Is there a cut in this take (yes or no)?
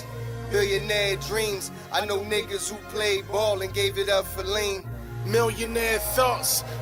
no